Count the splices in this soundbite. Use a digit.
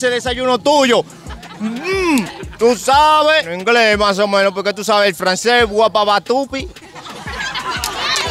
1